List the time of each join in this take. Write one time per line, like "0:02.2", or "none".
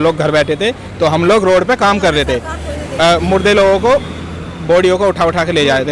none